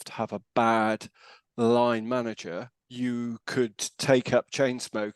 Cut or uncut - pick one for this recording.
uncut